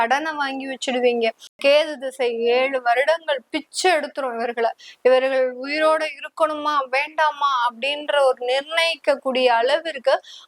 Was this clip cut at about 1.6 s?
yes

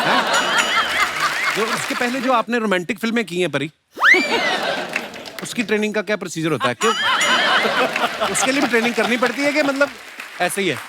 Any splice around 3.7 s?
no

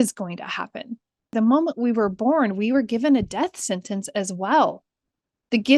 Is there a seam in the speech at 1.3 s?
yes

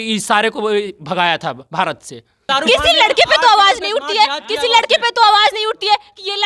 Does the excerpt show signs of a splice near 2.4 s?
yes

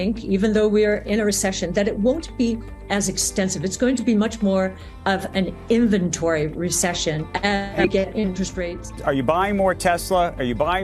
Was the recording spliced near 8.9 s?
yes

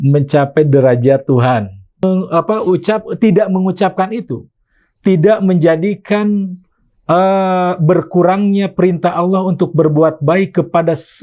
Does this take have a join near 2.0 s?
yes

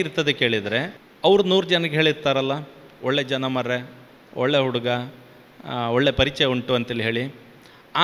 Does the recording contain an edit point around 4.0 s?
no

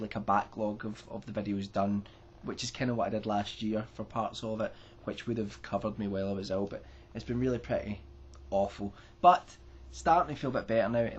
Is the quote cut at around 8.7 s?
no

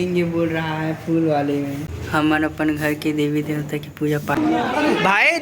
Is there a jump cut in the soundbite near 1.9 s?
yes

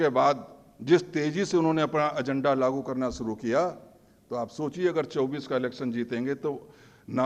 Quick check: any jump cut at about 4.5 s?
no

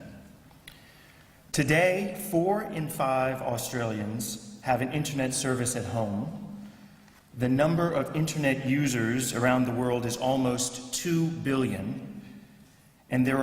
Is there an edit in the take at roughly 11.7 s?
no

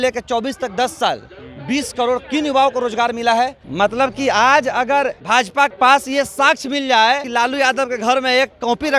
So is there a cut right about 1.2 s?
no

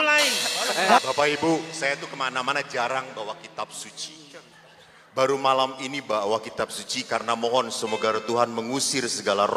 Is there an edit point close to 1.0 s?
yes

